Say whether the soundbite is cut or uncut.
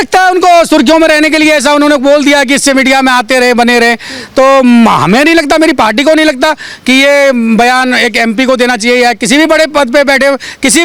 uncut